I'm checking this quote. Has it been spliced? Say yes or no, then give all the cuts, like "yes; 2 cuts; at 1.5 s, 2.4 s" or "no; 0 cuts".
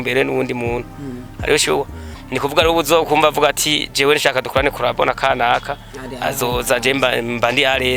no; 0 cuts